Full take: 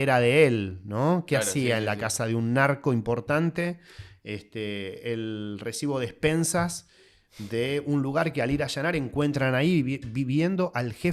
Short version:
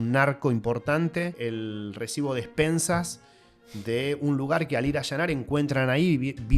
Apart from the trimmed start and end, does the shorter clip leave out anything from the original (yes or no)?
yes